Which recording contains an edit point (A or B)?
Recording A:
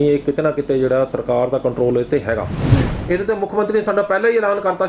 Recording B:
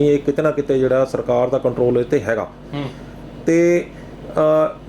A